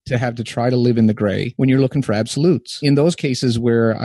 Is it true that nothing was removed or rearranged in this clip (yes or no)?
no